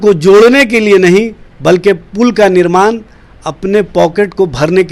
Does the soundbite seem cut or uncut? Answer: uncut